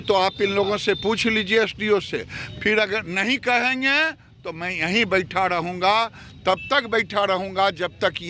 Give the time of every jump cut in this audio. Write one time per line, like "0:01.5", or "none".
none